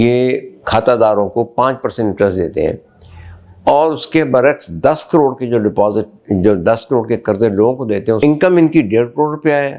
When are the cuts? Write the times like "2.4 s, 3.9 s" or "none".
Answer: 8.2 s

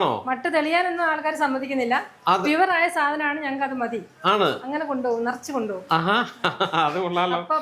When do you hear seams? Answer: none

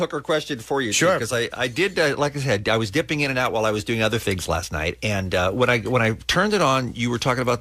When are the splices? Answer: none

